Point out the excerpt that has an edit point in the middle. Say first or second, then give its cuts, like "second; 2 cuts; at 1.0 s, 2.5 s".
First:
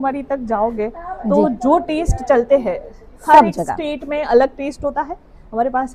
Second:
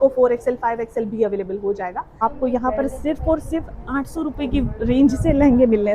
second; 1 cut; at 2.2 s